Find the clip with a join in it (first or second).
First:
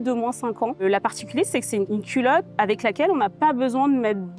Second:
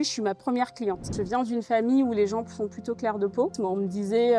second